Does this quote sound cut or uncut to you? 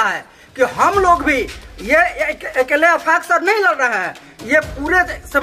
uncut